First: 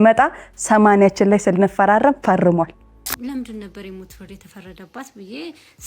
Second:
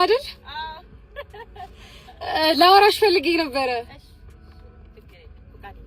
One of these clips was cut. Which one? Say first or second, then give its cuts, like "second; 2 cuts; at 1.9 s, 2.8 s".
first; 1 cut; at 2.7 s